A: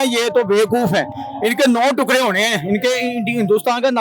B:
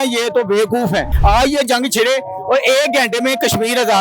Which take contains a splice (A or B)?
B